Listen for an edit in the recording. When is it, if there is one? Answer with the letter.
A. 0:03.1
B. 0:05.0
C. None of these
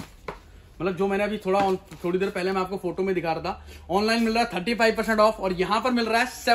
C